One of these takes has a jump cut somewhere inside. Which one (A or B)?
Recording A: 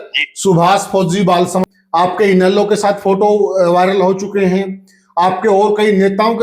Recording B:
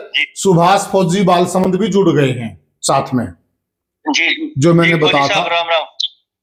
A